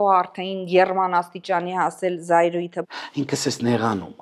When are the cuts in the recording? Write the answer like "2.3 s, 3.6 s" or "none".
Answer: 2.8 s